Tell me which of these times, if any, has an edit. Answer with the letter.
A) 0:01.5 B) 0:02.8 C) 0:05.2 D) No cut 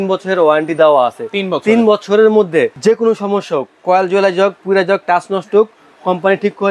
B